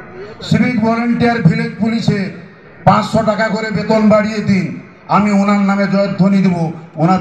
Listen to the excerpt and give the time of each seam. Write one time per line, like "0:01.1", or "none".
none

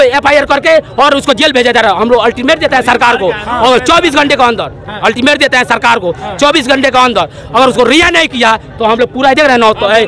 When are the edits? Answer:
none

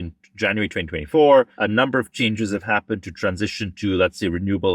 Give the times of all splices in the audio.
0:01.6

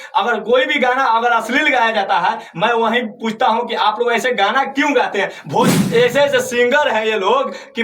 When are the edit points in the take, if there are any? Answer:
0:05.7

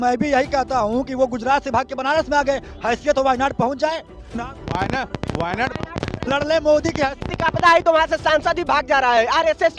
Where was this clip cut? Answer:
none

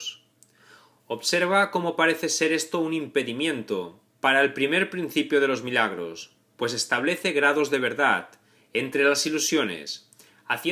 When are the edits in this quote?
none

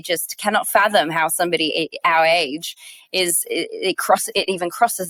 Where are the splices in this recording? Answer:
none

